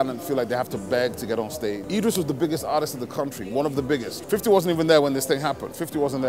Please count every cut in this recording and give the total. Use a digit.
2